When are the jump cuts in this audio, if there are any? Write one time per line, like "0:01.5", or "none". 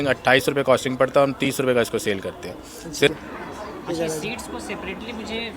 0:03.1